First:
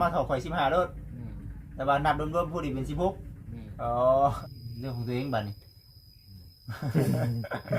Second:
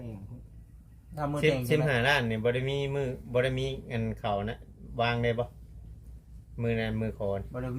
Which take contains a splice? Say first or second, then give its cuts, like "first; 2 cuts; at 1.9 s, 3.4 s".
first; 1 cut; at 4.4 s